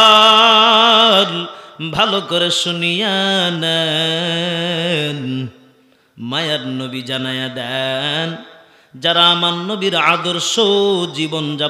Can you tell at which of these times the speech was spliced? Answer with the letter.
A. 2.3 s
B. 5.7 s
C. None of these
C